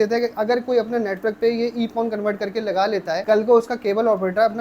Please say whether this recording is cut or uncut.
cut